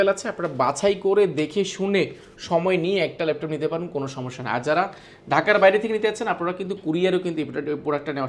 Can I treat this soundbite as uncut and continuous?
yes; 0 cuts

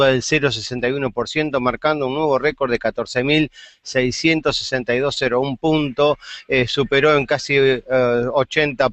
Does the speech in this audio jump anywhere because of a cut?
yes; 1 cut; at 6.1 s

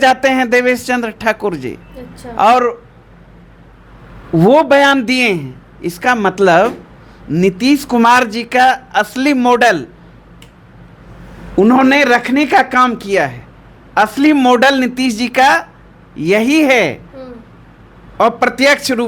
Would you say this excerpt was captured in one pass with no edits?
yes; 0 cuts

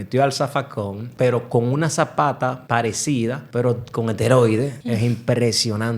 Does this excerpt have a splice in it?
yes; 3 cuts; at 1.0 s, 2.9 s, 4.8 s

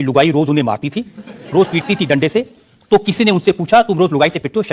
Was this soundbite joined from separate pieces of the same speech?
no; 0 cuts

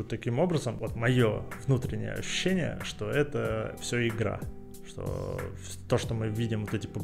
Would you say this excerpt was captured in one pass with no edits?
no; 2 cuts; at 0.8 s, 1.5 s

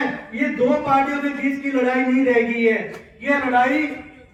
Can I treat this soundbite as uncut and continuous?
yes; 0 cuts

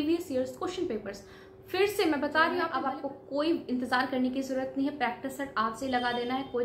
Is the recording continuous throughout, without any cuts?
no; 1 cut; at 2.7 s

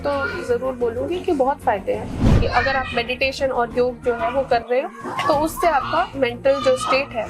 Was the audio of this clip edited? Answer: yes; 1 cut; at 2.3 s

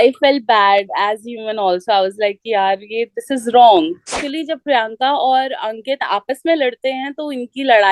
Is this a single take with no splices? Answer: no; 1 cut; at 4.2 s

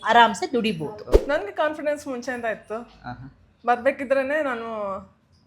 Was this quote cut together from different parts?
yes; 1 cut; at 1.1 s

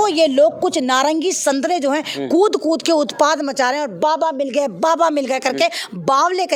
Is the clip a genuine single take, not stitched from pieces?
yes; 0 cuts

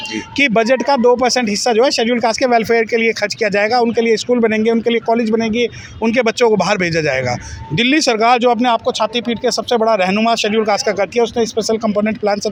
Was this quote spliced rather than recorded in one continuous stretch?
no; 0 cuts

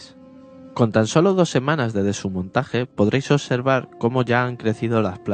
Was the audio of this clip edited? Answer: no; 0 cuts

